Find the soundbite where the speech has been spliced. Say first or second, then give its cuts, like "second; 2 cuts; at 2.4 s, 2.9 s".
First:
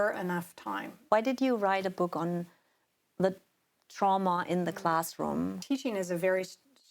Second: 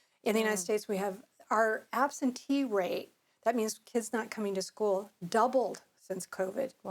first; 2 cuts; at 0.9 s, 5.6 s